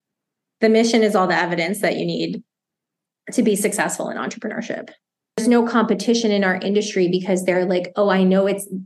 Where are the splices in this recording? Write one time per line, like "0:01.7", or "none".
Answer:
0:05.4